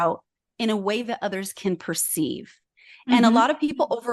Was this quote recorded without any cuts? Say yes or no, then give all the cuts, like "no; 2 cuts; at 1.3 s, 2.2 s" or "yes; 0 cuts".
yes; 0 cuts